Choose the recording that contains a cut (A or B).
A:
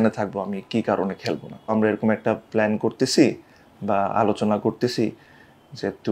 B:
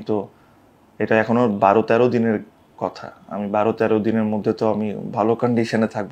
A